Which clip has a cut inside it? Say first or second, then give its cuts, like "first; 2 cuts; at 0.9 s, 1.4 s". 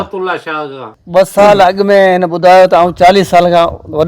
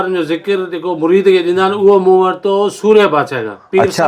first; 1 cut; at 0.9 s